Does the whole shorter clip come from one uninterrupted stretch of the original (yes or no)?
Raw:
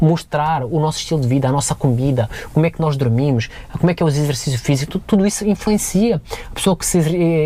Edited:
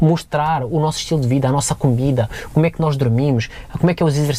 yes